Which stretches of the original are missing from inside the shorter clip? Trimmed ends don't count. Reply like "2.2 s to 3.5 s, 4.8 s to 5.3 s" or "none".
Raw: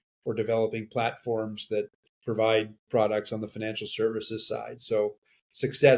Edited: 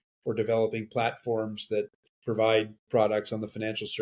none